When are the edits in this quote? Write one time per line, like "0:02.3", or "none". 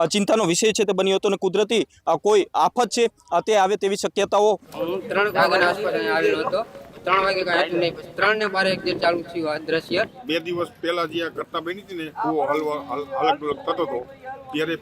0:04.7
0:10.2